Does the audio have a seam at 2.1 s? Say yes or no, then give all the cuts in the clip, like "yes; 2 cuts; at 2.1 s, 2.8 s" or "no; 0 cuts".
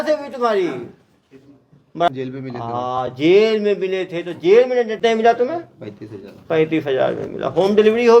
yes; 2 cuts; at 2.1 s, 5.0 s